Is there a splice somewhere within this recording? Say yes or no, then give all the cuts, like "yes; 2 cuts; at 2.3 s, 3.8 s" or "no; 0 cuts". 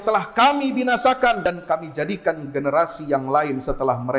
yes; 1 cut; at 1.4 s